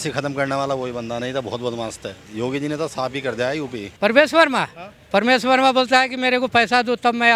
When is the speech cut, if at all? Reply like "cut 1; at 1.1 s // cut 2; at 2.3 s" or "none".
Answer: cut 1; at 2.2 s // cut 2; at 3.8 s

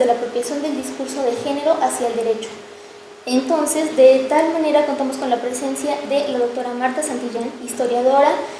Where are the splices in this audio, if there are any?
cut 1; at 7.4 s

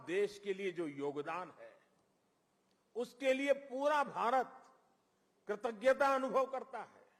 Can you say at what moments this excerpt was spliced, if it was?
none

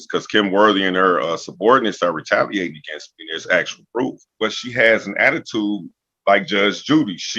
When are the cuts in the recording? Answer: cut 1; at 4.3 s

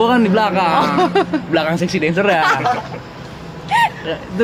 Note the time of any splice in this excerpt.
none

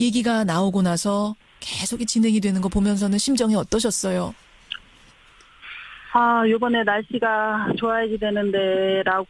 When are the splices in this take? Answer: none

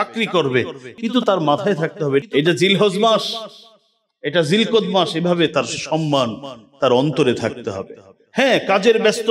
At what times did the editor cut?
cut 1; at 2.2 s

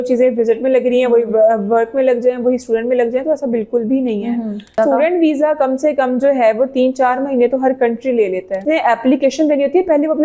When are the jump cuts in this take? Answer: cut 1; at 4.7 s // cut 2; at 8.6 s

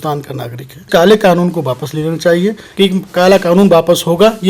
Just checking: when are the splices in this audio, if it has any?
cut 1; at 0.9 s // cut 2; at 2.6 s

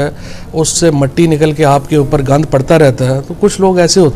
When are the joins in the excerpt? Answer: none

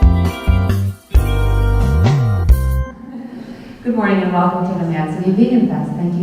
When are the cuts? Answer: none

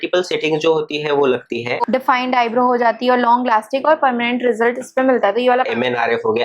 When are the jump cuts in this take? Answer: cut 1; at 1.8 s // cut 2; at 5.3 s

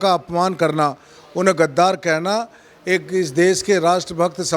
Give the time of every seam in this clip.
none

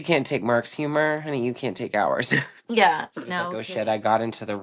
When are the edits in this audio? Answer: cut 1; at 3.6 s

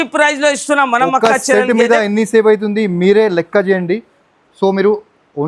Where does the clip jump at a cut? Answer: none

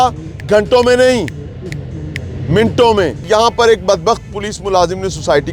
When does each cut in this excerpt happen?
cut 1; at 3.2 s

